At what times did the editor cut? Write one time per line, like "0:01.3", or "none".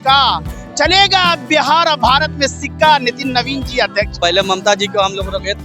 0:04.1